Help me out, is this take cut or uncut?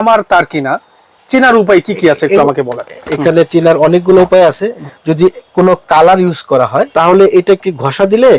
cut